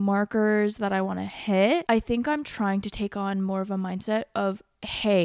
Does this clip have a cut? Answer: yes; 1 cut; at 1.8 s

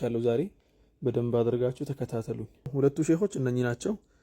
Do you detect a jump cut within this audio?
yes; 1 cut; at 2.7 s

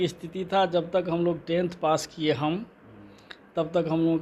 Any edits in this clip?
no; 0 cuts

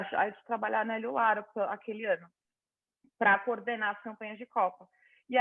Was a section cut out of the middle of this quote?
no; 0 cuts

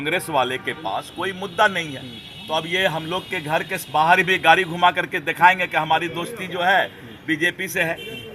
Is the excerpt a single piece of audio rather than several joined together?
yes; 0 cuts

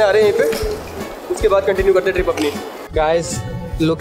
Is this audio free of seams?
no; 1 cut; at 2.8 s

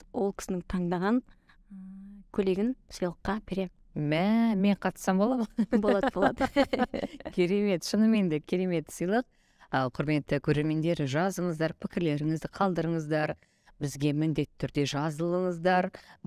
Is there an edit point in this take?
no; 0 cuts

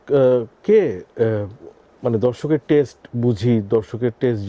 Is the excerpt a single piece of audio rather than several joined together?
yes; 0 cuts

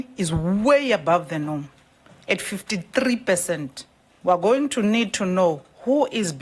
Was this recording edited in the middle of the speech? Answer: yes; 1 cut; at 4.0 s

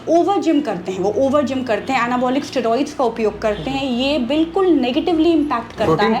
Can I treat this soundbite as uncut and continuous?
yes; 0 cuts

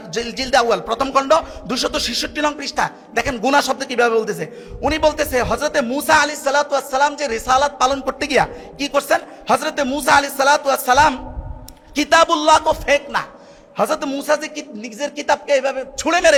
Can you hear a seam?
no; 0 cuts

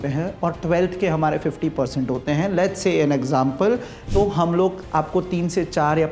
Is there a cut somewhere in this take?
yes; 1 cut; at 3.9 s

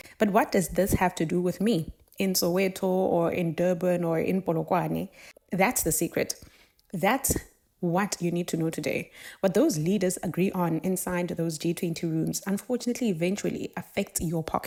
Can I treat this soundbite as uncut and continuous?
yes; 0 cuts

